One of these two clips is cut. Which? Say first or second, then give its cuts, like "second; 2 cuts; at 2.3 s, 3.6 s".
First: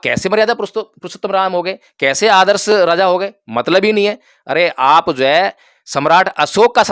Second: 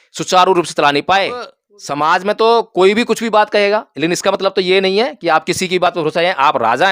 second; 1 cut; at 1.5 s